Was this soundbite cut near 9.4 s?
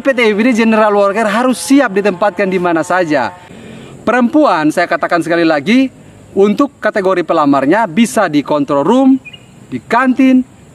no; 1 cut; at 3.7 s

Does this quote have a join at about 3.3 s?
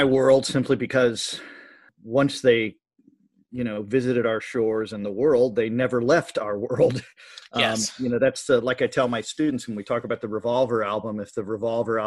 no; 1 cut; at 1.9 s

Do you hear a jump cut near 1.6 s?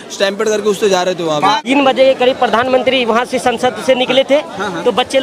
yes; 1 cut; at 1.6 s

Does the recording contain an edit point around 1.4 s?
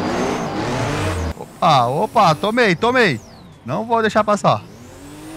yes; 1 cut; at 1.4 s

